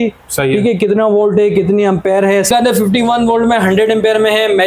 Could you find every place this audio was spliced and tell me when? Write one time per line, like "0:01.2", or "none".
0:02.5